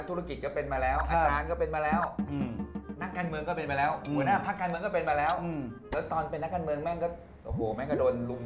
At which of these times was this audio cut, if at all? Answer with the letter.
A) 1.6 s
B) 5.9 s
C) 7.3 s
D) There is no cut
D